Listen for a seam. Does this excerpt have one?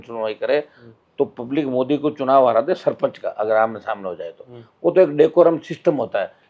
no; 0 cuts

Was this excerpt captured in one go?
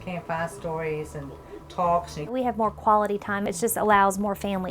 no; 2 cuts; at 2.3 s, 3.5 s

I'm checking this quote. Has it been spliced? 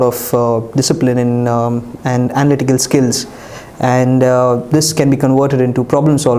no; 0 cuts

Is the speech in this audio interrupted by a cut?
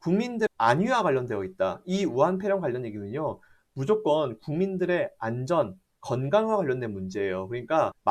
no; 0 cuts

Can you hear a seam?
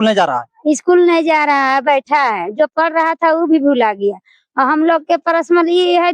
no; 0 cuts

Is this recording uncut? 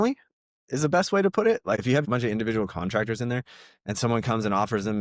no; 1 cut; at 2.0 s

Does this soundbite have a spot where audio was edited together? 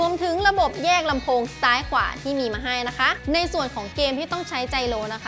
yes; 1 cut; at 3.2 s

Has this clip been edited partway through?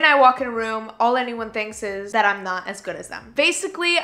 yes; 2 cuts; at 2.0 s, 3.1 s

